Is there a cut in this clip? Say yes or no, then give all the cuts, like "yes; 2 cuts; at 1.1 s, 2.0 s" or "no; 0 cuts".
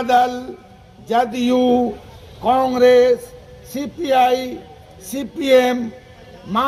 no; 0 cuts